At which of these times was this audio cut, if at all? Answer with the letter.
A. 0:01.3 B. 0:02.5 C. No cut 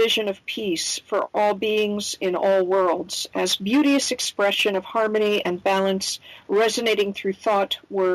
A